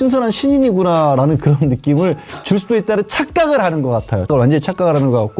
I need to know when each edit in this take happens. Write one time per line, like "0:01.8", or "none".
0:04.3